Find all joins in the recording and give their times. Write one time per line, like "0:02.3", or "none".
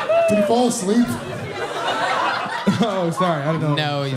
none